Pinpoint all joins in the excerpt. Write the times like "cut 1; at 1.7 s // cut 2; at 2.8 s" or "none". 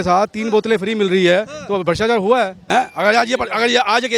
cut 1; at 2.6 s

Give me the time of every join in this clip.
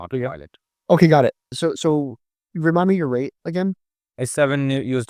cut 1; at 1.6 s

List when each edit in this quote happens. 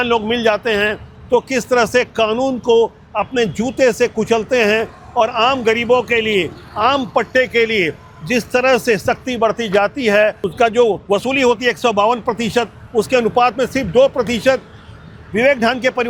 none

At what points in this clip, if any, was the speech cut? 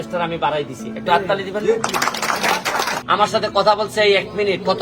cut 1; at 3.0 s

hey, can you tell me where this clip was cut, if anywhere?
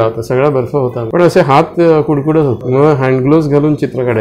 cut 1; at 1.0 s // cut 2; at 2.6 s

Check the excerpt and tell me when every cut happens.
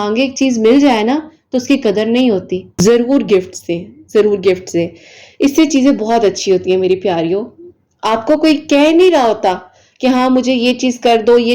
cut 1; at 2.7 s

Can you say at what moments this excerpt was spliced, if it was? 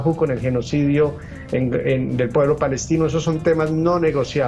none

